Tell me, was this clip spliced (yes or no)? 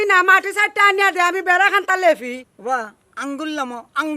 yes